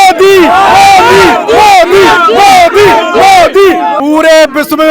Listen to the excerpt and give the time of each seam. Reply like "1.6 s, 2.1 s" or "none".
4.0 s